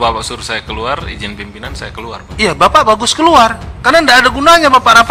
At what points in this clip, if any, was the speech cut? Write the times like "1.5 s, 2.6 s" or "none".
none